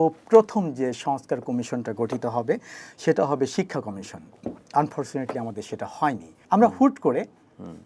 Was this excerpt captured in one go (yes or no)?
no